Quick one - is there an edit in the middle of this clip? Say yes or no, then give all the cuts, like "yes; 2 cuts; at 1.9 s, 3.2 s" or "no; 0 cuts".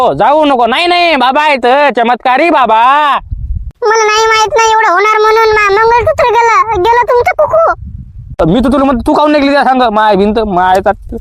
no; 0 cuts